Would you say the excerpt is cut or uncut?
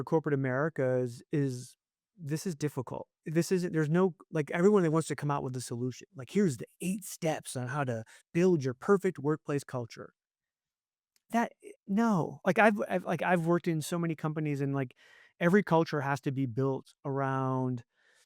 cut